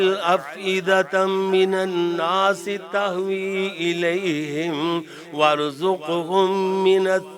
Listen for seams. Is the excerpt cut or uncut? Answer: uncut